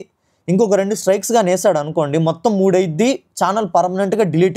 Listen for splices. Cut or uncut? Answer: uncut